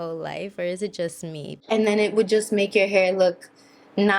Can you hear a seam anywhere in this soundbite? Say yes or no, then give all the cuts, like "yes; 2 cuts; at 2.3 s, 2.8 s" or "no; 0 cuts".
yes; 1 cut; at 1.5 s